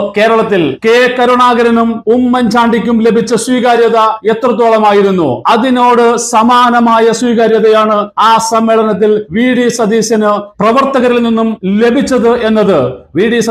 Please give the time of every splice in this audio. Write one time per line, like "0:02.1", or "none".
none